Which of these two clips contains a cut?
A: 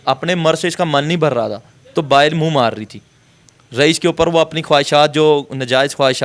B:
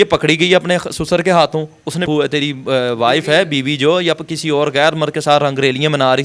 B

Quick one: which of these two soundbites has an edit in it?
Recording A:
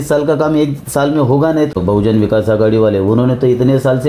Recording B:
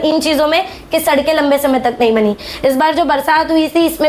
A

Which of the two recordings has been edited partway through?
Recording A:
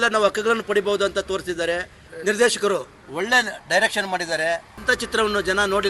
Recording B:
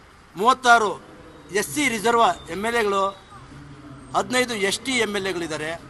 A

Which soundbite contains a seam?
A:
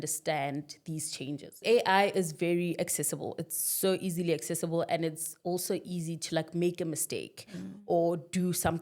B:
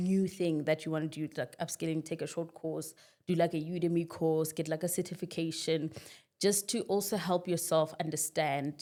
A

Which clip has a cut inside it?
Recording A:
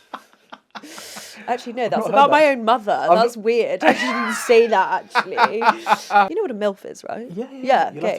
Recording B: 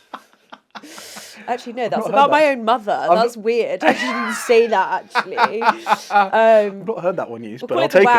A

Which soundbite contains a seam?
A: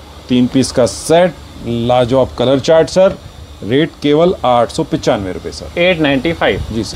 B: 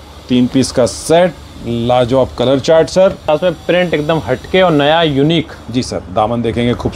B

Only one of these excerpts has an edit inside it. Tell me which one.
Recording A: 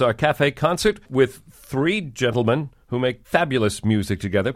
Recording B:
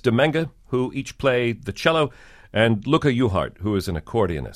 A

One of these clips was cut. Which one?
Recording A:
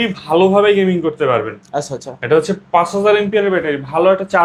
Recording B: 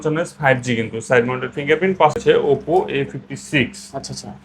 B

